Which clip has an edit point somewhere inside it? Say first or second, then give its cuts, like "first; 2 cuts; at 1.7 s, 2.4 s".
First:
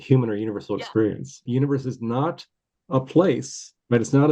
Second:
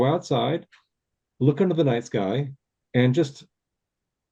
first; 1 cut; at 1.4 s